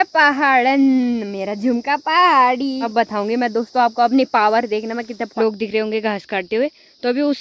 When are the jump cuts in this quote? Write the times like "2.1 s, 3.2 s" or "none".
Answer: 2.8 s, 5.2 s